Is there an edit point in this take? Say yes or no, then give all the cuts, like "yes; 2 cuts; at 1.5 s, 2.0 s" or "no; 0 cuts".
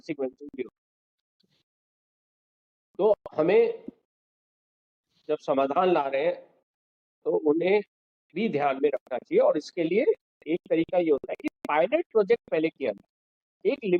no; 0 cuts